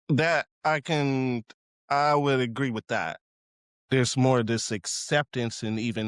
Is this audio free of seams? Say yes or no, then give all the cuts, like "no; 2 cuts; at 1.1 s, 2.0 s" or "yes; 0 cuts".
no; 1 cut; at 3.2 s